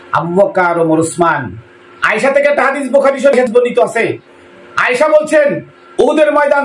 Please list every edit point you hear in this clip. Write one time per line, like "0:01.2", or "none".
0:03.4